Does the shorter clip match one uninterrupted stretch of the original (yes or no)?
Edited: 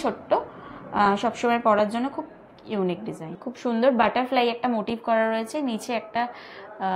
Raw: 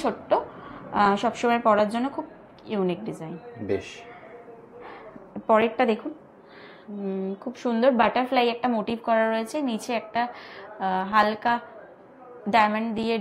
no